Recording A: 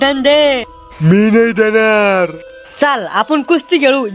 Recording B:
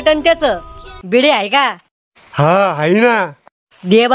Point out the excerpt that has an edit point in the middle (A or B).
B